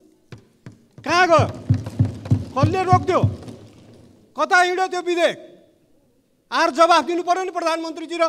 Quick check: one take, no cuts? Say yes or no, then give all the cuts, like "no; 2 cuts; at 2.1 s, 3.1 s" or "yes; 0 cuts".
yes; 0 cuts